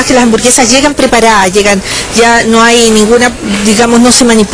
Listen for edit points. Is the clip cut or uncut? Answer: uncut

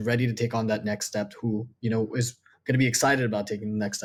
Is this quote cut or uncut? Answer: uncut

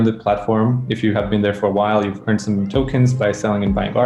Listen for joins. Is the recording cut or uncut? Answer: uncut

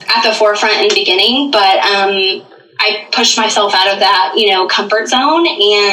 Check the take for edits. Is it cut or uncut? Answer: uncut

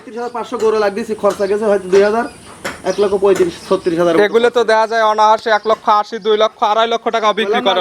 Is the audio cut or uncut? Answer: uncut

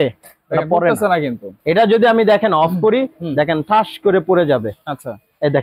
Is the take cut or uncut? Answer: uncut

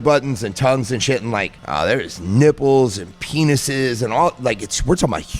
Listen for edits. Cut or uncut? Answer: cut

